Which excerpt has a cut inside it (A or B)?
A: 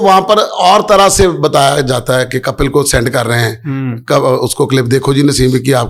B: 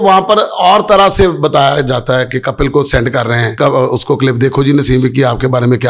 B